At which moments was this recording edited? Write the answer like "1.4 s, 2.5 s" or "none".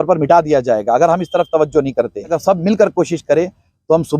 2.4 s